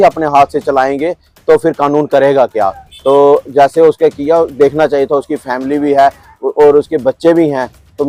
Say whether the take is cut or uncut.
uncut